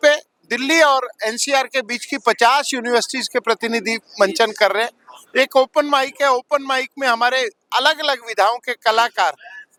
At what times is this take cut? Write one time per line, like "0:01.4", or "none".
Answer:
none